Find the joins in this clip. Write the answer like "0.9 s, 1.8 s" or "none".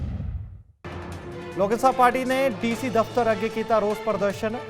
1.4 s